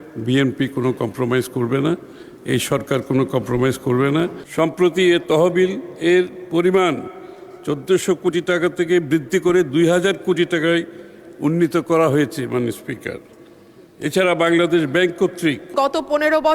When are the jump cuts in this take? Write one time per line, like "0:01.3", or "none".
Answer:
0:04.4
0:15.7